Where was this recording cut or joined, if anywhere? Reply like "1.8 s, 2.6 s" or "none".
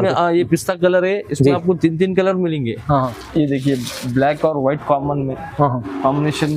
3.2 s